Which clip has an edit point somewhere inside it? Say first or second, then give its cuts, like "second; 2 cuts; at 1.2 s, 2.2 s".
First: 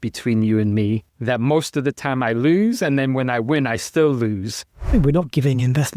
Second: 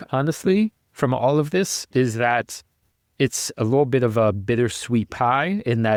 first; 2 cuts; at 1.1 s, 4.9 s